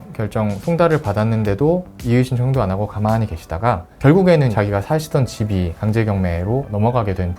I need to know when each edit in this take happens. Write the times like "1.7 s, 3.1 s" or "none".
5.7 s